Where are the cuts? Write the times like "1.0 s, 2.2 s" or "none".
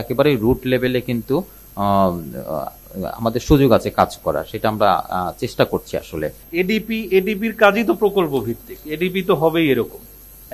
none